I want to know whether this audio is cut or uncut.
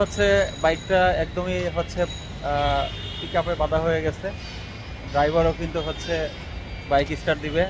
uncut